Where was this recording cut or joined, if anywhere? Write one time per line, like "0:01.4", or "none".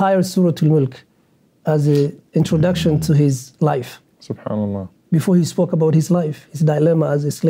0:04.9

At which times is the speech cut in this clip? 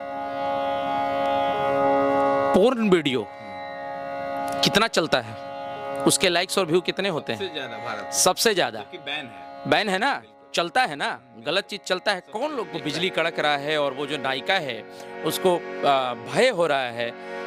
0:12.8

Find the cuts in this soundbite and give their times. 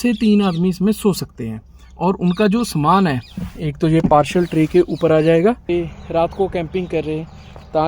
0:05.6

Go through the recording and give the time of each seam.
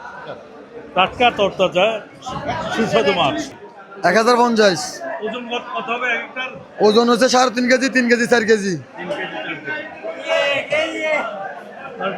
0:03.5

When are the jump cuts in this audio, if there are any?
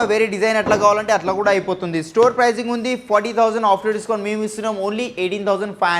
none

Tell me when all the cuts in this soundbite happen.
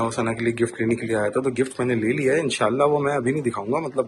none

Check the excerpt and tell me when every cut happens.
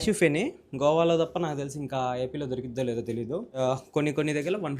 0:03.6

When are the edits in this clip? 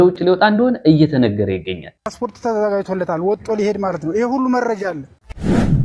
0:02.0
0:04.8

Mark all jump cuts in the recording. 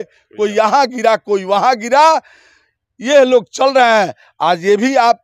none

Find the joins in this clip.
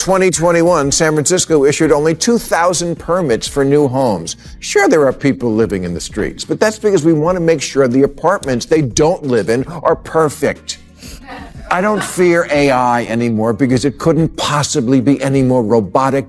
none

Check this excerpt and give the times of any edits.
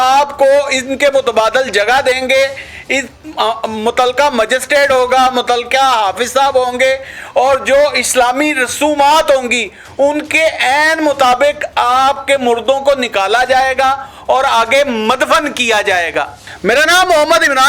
none

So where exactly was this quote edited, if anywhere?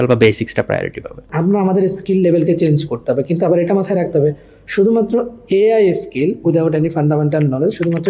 0:01.3

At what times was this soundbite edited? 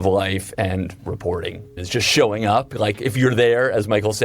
0:01.7

